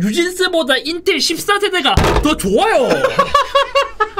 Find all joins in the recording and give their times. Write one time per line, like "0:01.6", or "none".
none